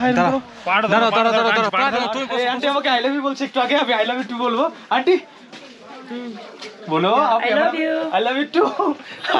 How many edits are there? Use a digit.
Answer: 1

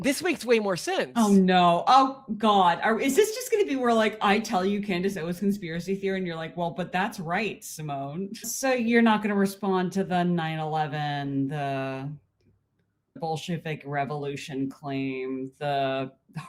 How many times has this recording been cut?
2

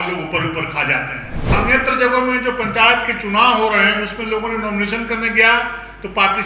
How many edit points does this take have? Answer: 1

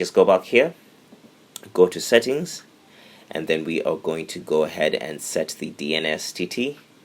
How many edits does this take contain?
0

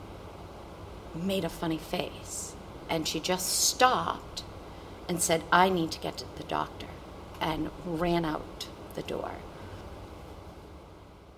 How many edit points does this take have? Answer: 1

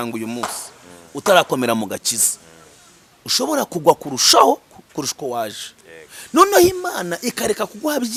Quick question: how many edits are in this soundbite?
0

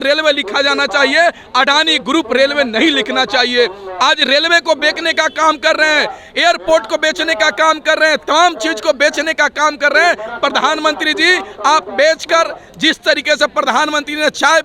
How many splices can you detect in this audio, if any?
0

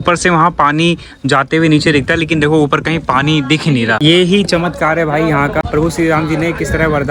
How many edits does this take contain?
2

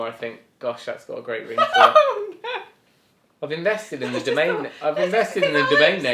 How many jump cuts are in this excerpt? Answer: 0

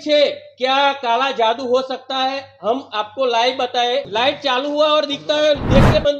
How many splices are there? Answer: 1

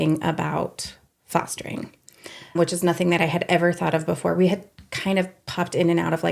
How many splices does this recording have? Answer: 1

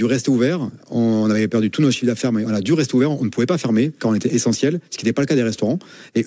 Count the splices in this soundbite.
0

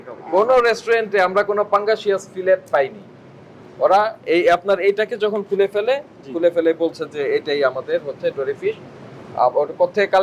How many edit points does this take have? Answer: 0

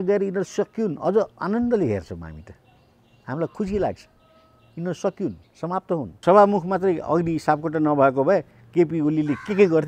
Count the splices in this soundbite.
1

